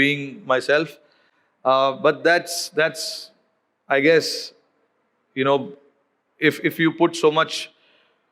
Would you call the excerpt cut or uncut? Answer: uncut